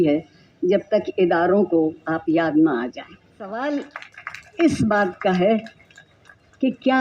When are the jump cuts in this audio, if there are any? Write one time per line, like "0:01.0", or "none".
0:03.4